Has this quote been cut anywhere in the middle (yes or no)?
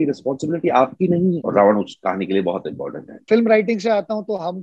yes